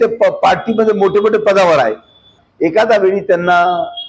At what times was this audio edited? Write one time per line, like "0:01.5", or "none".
0:02.4

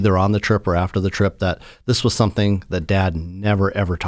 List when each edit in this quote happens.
none

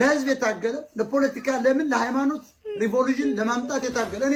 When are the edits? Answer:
none

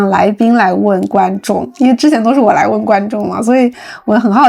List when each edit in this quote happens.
none

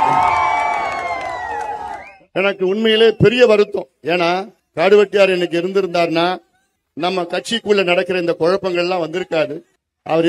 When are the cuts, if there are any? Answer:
0:02.2

